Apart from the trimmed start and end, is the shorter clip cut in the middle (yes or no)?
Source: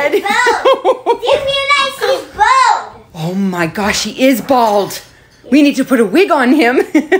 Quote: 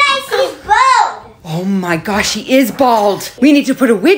yes